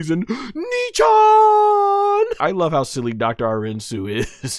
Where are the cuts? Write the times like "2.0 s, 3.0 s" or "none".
2.4 s